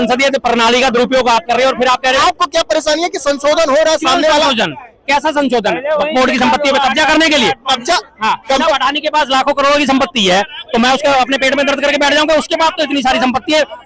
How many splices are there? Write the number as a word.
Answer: two